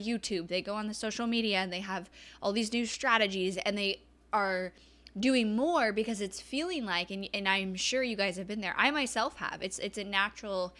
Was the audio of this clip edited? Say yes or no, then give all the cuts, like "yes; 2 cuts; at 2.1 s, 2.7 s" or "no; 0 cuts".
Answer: no; 0 cuts